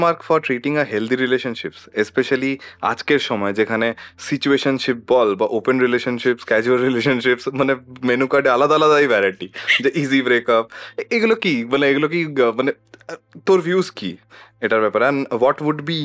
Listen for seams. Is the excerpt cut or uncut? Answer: uncut